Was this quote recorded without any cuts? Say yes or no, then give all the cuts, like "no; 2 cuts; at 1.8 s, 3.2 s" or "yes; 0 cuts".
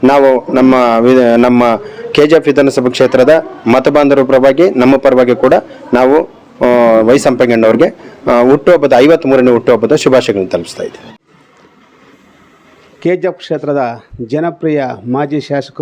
no; 1 cut; at 11.2 s